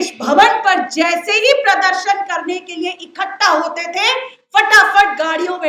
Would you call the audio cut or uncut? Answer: uncut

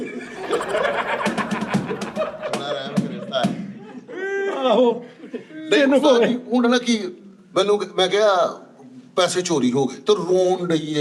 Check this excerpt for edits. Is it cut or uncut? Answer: uncut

